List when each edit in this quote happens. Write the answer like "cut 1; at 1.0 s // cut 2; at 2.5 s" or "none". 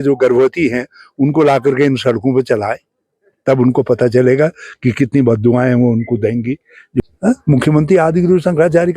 cut 1; at 7.0 s